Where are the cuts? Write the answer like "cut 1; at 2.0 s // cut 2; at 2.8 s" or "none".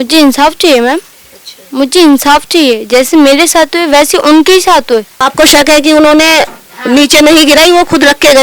cut 1; at 5.2 s